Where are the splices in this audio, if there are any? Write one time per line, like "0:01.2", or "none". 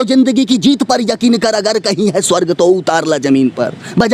none